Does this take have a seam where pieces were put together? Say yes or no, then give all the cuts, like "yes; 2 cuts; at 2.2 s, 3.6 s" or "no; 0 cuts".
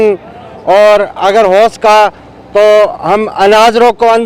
no; 0 cuts